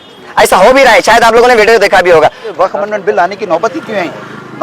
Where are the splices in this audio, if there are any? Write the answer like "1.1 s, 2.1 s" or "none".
2.4 s